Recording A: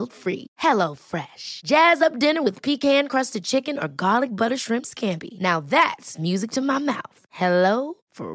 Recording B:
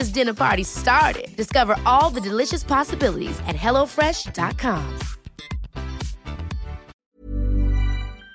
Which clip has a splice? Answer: B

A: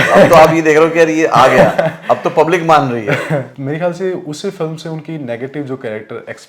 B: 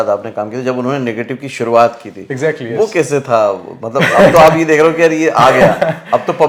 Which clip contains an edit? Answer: A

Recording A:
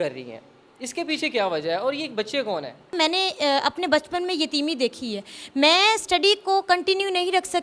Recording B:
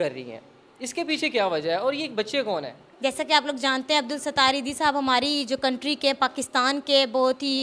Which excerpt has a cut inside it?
A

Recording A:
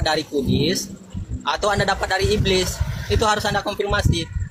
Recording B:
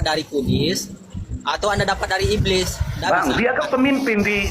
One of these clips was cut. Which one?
B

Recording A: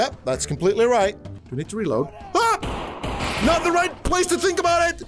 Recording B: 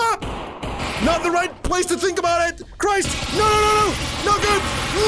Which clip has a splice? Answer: A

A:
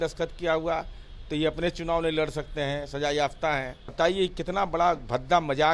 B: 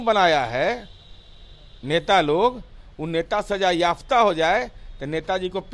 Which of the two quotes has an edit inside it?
A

